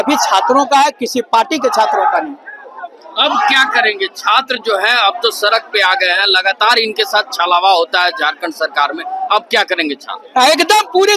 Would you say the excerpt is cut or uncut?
uncut